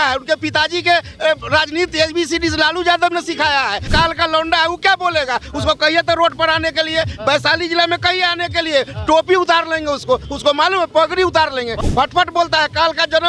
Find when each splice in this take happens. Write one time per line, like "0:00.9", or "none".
0:03.9
0:11.8